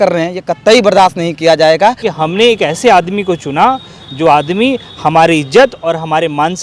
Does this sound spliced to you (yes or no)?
yes